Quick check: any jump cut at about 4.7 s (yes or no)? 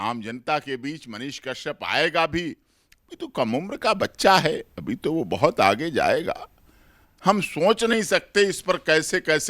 no